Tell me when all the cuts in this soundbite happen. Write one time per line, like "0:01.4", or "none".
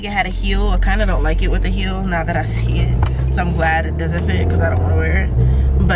none

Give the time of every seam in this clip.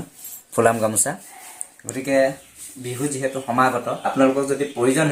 none

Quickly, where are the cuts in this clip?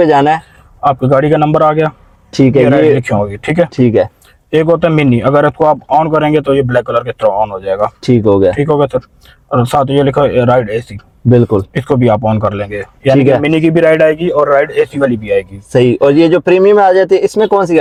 none

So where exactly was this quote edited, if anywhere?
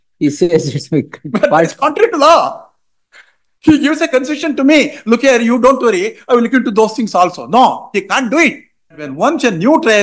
0:09.1

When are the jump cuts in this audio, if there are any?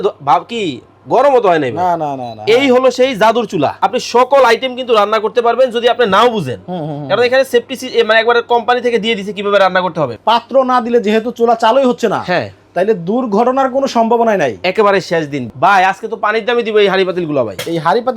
0:03.7
0:10.2
0:15.5

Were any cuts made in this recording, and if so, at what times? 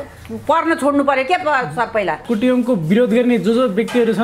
0:02.2

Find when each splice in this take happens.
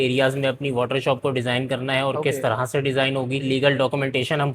0:03.4

